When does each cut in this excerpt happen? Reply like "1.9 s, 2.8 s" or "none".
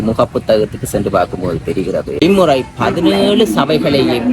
2.2 s

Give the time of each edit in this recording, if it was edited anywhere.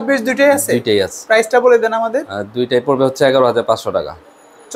none

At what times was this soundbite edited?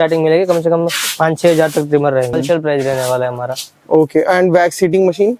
2.3 s

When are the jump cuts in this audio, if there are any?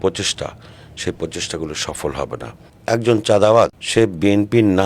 2.7 s, 3.8 s

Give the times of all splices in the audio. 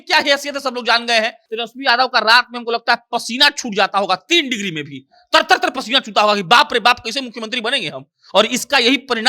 1.4 s

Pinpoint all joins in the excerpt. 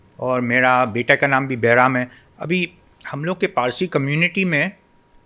none

